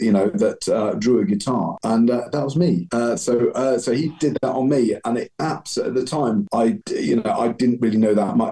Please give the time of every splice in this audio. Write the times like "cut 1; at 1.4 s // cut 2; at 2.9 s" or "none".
cut 1; at 1.8 s // cut 2; at 2.9 s // cut 3; at 6.6 s